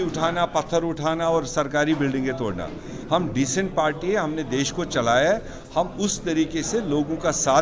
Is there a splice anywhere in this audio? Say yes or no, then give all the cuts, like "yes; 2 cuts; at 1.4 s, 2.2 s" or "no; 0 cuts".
no; 0 cuts